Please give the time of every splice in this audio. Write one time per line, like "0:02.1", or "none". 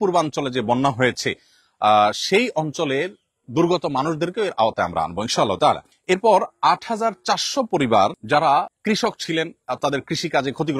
0:05.9
0:08.2
0:08.7